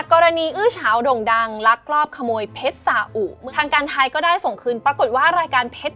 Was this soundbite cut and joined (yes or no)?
yes